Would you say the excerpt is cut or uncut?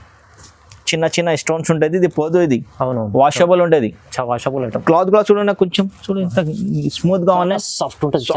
uncut